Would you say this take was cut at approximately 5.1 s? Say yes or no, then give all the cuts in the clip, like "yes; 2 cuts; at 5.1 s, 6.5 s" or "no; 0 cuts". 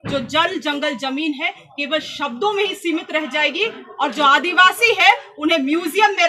no; 0 cuts